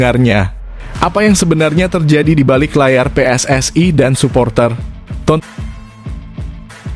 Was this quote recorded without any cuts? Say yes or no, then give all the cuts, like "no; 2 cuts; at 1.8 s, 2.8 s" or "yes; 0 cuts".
no; 1 cut; at 5.4 s